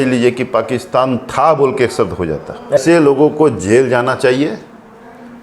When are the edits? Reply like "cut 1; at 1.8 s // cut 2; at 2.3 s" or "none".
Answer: cut 1; at 2.8 s